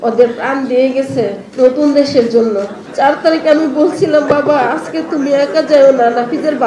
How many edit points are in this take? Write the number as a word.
one